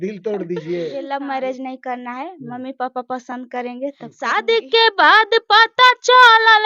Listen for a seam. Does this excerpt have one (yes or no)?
yes